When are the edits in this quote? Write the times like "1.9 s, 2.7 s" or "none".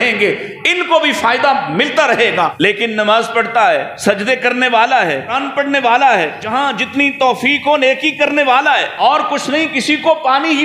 2.5 s, 3.9 s, 5.4 s, 6.4 s, 9.0 s